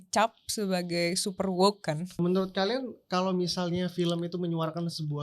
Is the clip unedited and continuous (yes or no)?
no